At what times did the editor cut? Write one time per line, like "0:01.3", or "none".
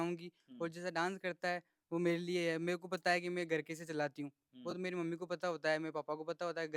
none